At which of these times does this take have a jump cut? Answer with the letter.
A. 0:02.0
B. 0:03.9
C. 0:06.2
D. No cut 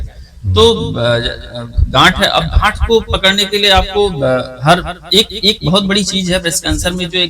D